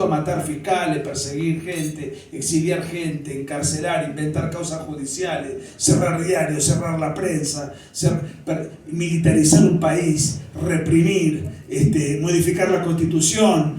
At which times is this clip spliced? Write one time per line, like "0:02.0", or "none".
none